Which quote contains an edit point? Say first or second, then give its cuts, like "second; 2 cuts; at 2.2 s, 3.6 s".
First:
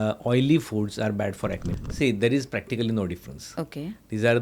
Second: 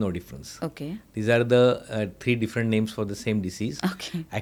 first; 1 cut; at 1.6 s